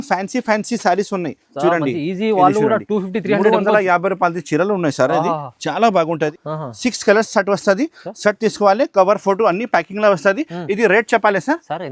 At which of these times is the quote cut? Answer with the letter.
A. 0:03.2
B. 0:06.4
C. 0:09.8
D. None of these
B